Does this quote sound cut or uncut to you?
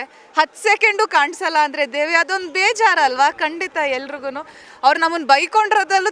cut